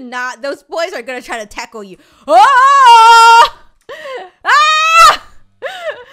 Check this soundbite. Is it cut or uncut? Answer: uncut